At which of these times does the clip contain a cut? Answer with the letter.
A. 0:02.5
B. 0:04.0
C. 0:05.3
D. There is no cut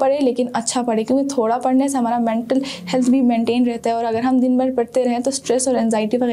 D